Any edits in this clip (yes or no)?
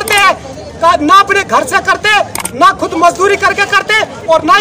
no